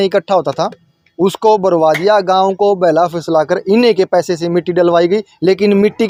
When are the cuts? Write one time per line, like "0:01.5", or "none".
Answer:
none